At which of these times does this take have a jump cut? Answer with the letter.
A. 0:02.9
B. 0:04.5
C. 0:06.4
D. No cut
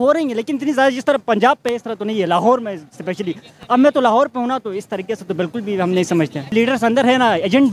C